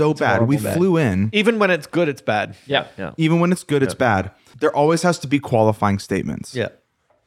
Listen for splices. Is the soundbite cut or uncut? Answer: cut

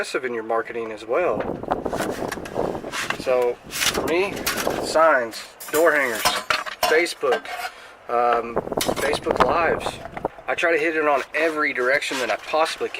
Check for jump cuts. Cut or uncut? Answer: cut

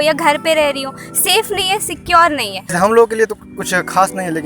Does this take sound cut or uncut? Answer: cut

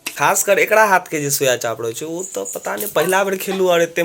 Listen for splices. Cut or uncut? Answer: uncut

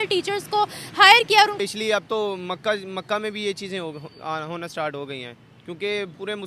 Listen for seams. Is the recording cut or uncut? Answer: cut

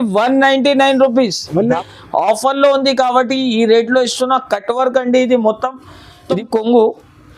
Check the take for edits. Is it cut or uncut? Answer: cut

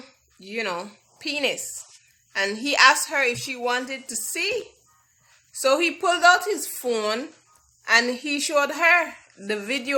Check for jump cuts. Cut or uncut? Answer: uncut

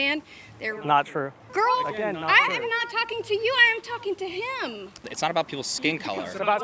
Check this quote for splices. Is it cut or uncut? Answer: cut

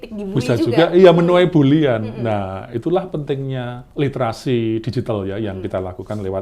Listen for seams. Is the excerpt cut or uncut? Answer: cut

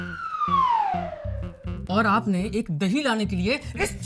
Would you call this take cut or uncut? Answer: uncut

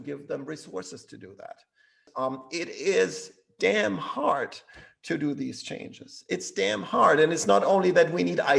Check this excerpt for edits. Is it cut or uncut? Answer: cut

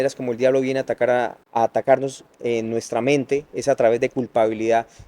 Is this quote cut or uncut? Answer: cut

